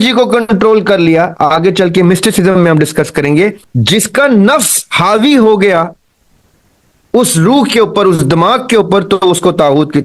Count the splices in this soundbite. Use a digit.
1